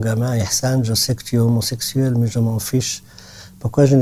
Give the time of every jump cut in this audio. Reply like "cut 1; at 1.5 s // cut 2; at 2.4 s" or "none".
none